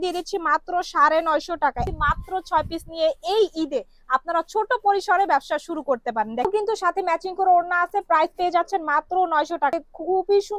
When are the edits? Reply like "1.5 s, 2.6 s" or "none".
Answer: 1.8 s, 6.4 s, 9.8 s